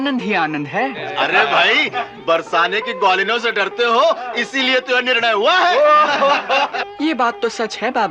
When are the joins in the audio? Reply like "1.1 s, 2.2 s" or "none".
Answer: 1.0 s